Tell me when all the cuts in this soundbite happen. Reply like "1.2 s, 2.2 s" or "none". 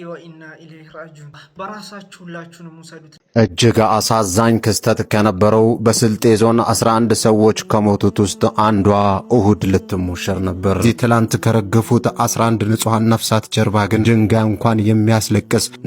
1.4 s, 3.2 s